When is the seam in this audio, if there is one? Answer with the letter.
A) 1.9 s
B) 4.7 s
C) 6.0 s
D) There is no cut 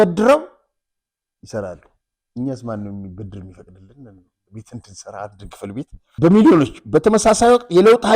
D